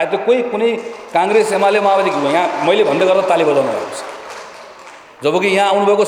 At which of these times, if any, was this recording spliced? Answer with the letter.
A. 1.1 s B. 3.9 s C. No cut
C